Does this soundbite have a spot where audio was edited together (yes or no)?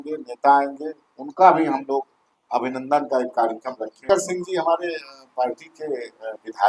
yes